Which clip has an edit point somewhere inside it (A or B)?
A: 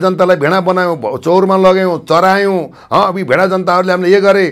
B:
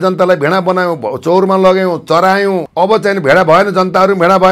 B